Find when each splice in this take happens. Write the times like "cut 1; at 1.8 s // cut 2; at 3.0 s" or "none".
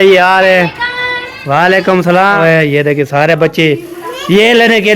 cut 1; at 2.4 s